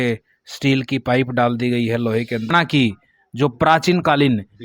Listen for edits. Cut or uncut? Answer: cut